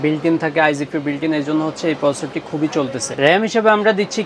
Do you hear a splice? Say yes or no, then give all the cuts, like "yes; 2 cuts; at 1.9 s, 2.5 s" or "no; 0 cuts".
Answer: yes; 1 cut; at 3.1 s